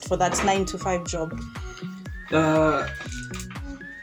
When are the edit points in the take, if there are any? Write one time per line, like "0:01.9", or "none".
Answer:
none